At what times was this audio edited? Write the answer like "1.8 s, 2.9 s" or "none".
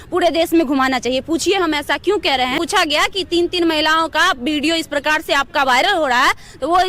2.5 s